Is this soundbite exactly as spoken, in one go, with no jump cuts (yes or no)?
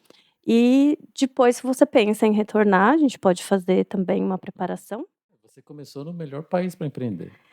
no